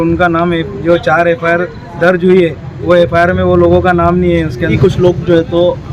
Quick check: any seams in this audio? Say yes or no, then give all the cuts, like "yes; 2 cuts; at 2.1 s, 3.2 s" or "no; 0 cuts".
yes; 1 cut; at 4.8 s